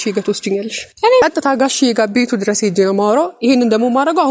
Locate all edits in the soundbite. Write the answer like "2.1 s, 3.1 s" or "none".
1.2 s